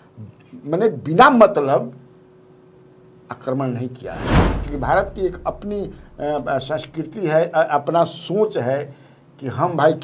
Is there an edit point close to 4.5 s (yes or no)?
yes